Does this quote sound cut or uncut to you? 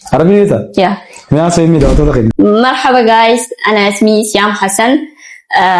cut